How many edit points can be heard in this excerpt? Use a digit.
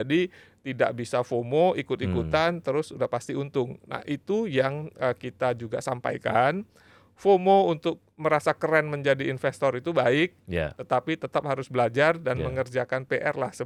0